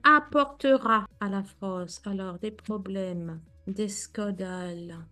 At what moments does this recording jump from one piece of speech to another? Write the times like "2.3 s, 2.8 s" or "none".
none